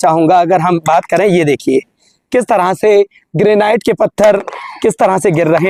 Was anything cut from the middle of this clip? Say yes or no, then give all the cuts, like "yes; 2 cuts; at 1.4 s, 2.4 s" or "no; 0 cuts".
no; 0 cuts